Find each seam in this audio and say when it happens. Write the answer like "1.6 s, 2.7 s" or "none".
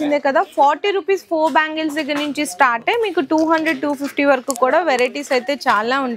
none